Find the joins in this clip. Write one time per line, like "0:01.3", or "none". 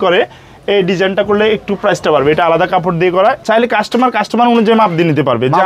0:03.4